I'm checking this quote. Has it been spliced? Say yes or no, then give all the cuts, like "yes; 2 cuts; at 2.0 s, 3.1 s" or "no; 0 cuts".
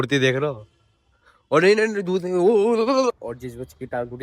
yes; 1 cut; at 3.2 s